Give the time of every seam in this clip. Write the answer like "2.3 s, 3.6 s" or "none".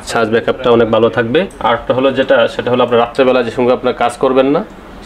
1.5 s